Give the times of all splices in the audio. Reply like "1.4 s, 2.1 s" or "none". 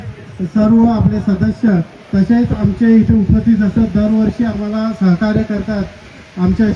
none